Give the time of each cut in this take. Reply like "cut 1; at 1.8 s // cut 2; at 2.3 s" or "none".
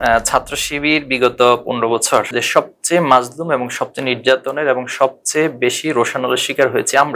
cut 1; at 2.4 s